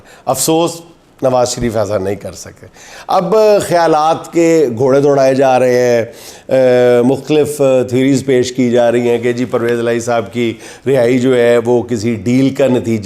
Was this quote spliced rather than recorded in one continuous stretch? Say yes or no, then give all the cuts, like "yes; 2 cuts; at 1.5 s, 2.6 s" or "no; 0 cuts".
no; 0 cuts